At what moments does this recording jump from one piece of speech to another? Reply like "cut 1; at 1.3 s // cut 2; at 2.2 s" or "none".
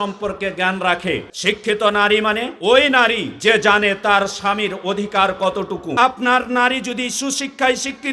cut 1; at 1.3 s // cut 2; at 2.5 s // cut 3; at 3.3 s // cut 4; at 5.9 s